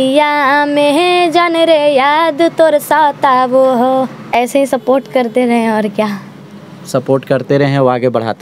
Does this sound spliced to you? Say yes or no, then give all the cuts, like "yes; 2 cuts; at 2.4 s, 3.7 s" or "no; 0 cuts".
no; 0 cuts